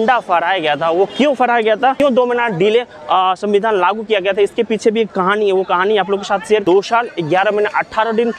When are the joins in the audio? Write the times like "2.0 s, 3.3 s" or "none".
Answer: 2.0 s, 6.6 s